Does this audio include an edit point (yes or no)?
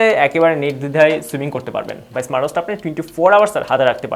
no